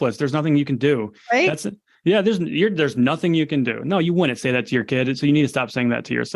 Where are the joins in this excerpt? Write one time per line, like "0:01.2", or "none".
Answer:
none